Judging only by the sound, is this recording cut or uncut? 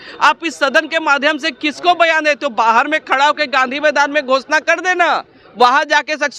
uncut